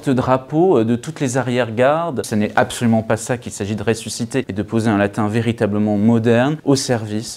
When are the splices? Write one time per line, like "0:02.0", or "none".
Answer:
0:02.3
0:04.5
0:06.6